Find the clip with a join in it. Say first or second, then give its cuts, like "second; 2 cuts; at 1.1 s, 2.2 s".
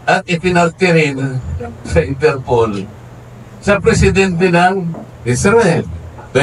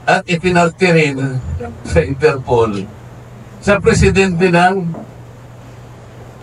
first; 1 cut; at 5.1 s